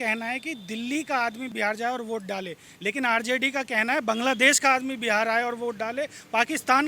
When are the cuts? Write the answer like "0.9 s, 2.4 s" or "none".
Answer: 1.5 s